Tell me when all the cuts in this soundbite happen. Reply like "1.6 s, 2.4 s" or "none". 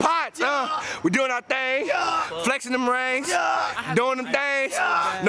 none